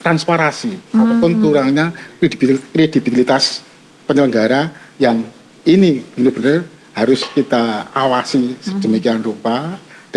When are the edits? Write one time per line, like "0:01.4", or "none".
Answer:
none